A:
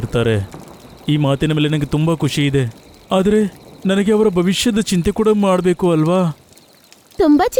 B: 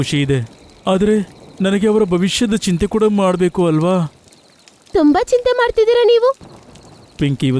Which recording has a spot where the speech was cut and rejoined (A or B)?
B